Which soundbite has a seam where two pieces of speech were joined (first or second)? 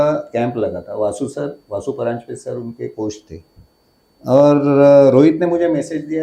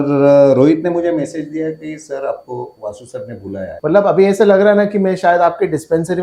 second